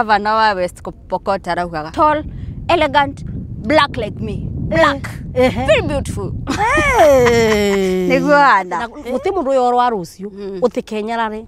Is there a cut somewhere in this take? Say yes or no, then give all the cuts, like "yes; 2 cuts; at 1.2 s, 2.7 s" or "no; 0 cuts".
yes; 2 cuts; at 1.9 s, 8.8 s